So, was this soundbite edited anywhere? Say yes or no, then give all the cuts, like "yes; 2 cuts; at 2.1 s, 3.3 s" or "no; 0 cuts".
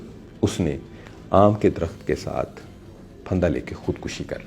no; 0 cuts